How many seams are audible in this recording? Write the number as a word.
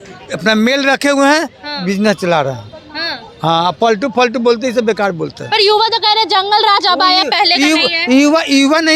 zero